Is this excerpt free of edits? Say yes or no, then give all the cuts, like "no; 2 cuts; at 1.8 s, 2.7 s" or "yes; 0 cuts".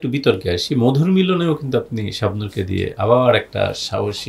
yes; 0 cuts